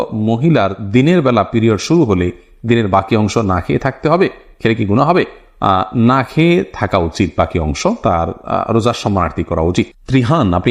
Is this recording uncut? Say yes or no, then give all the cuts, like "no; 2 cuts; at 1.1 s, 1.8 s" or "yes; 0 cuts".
yes; 0 cuts